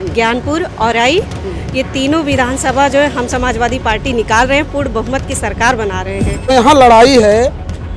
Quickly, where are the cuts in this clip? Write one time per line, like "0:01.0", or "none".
0:06.5